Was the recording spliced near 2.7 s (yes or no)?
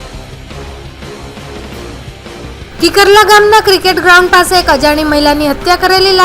yes